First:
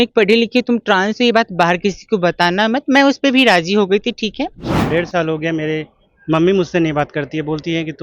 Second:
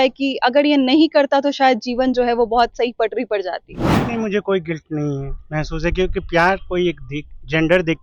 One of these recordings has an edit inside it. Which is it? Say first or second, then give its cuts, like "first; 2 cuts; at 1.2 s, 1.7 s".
first; 1 cut; at 4.8 s